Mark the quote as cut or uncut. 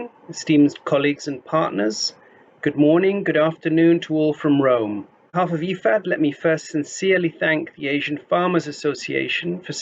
cut